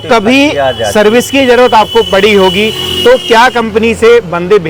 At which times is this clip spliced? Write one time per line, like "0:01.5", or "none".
none